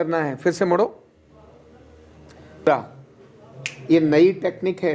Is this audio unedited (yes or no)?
no